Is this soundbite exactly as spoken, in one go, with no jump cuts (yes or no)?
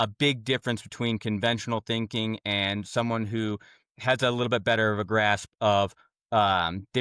yes